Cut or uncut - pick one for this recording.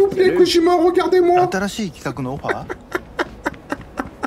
uncut